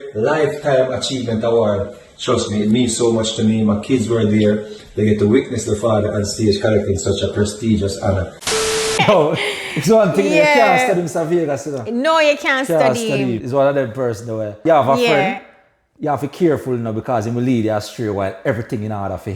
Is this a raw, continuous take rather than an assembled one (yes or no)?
no